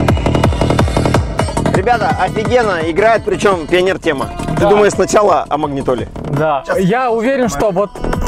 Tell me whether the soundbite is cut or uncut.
cut